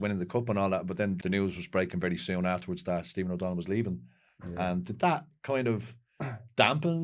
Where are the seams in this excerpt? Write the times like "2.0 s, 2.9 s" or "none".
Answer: 1.2 s